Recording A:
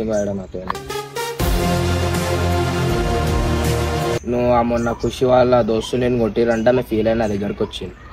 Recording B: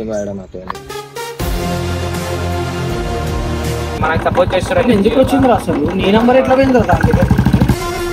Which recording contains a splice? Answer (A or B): B